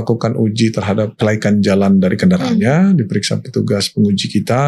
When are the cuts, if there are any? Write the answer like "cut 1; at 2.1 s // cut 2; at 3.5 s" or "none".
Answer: cut 1; at 1.1 s